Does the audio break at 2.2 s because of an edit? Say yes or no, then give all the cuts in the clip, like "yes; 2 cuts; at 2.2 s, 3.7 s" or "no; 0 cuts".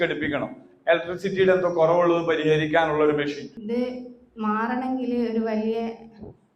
no; 1 cut; at 3.5 s